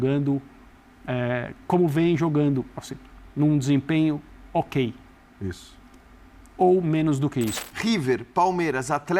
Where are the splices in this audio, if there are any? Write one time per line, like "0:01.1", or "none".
0:07.7